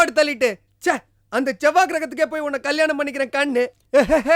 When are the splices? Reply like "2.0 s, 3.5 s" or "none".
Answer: none